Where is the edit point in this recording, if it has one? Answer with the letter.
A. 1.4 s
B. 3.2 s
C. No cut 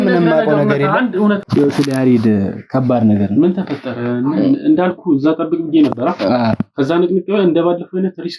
A